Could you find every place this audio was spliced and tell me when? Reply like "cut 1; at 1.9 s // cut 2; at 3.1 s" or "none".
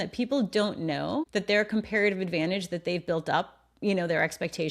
cut 1; at 1.3 s